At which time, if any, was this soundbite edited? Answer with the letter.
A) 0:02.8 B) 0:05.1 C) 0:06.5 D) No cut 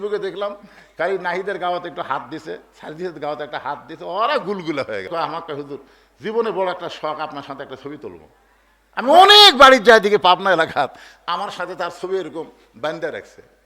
B